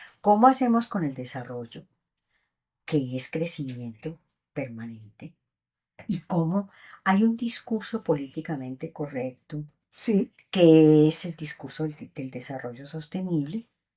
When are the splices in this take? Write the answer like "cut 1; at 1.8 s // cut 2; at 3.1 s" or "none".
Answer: cut 1; at 6.0 s